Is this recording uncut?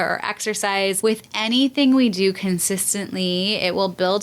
no; 1 cut; at 1.0 s

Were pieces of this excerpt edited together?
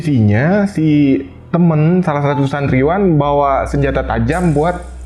no; 0 cuts

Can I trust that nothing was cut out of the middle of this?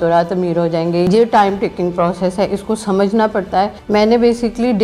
no; 2 cuts; at 1.1 s, 3.8 s

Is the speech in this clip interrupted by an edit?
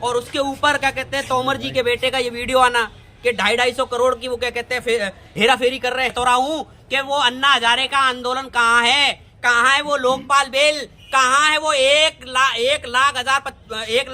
yes; 1 cut; at 6.1 s

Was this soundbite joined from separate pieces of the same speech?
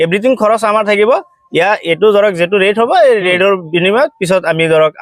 no; 0 cuts

